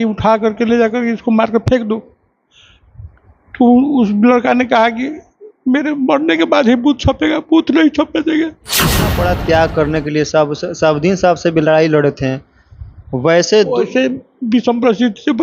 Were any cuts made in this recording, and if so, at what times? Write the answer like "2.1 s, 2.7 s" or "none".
9.1 s